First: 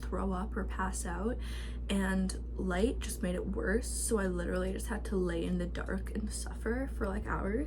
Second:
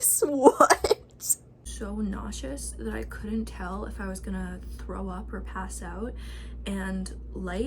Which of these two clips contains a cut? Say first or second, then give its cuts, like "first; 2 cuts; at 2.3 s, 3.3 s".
second; 1 cut; at 1.6 s